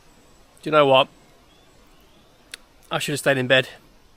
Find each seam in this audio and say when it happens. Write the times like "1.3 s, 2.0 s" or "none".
none